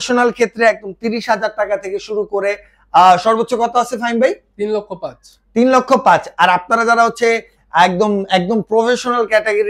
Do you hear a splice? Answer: no; 0 cuts

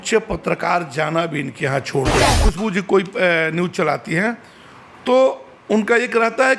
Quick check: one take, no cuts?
no; 1 cut; at 2.3 s

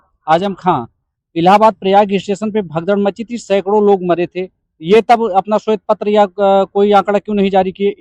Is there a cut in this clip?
no; 0 cuts

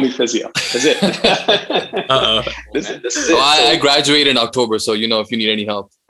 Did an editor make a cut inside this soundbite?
yes; 1 cut; at 2.8 s

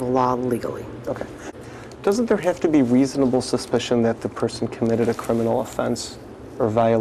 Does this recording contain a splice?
yes; 1 cut; at 1.5 s

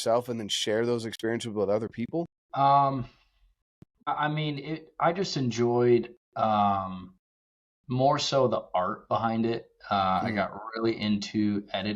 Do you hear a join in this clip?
yes; 2 cuts; at 2.4 s, 4.1 s

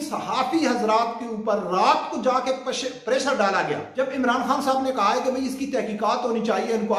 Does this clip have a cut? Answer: yes; 1 cut; at 3.9 s

